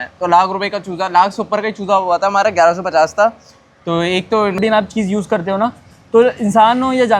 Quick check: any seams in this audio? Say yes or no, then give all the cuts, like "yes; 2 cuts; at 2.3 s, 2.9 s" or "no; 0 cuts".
yes; 1 cut; at 4.6 s